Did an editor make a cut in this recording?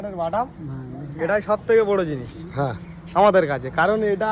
no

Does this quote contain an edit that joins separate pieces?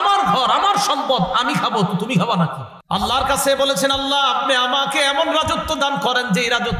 yes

